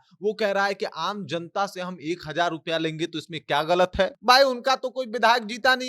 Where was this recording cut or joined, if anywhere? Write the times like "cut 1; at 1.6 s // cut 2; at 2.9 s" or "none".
cut 1; at 4.2 s